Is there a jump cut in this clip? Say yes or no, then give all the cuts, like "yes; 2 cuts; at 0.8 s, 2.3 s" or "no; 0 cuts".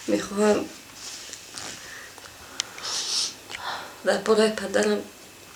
no; 0 cuts